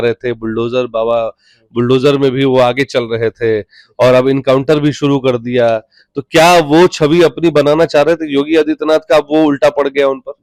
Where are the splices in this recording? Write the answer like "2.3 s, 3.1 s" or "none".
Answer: none